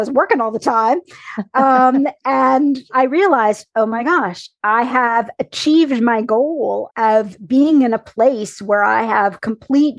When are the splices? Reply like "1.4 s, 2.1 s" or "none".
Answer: 2.9 s, 6.9 s